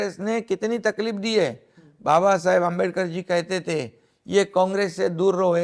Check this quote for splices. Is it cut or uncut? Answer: uncut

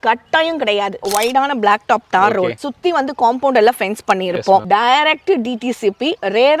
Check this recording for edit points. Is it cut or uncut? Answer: cut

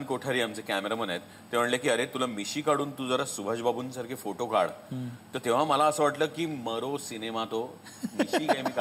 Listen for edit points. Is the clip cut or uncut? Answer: uncut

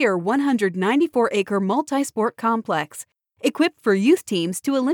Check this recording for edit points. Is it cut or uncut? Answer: uncut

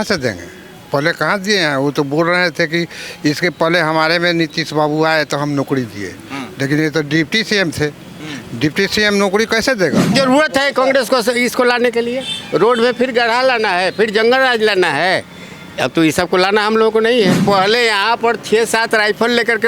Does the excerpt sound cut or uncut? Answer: cut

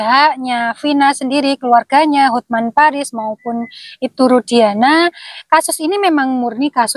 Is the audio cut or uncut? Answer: uncut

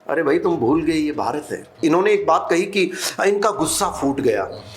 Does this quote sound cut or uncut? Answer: cut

